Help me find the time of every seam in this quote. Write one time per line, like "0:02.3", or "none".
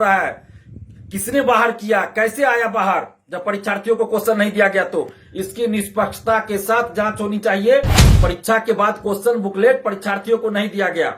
0:08.0